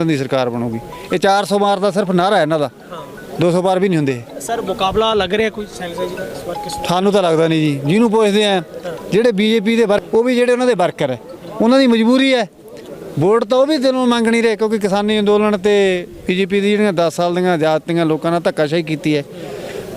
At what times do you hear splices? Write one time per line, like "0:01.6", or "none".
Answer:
0:10.0